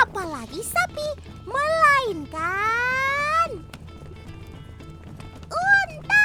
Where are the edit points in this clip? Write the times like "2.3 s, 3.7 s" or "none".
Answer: none